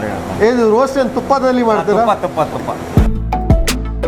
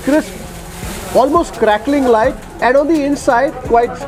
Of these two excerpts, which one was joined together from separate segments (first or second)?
first